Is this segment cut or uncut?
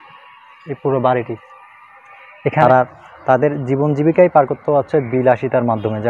cut